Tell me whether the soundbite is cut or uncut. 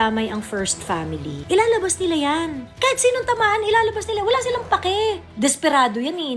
cut